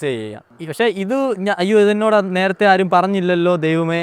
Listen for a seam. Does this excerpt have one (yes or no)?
no